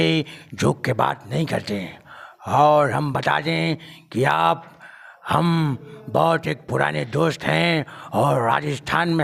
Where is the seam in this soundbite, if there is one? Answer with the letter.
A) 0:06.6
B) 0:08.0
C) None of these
C